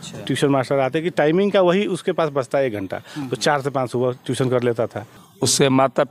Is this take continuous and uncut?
no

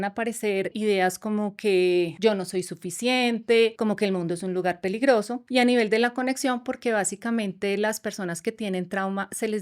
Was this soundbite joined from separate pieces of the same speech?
yes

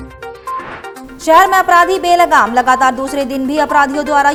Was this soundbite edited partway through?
no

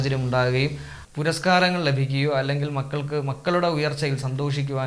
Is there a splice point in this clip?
yes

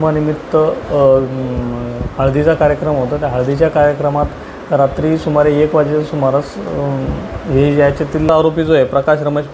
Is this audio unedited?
no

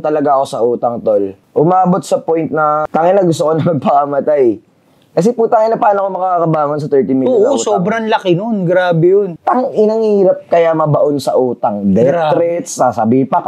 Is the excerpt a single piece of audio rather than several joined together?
no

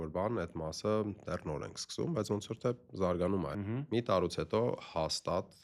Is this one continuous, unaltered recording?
no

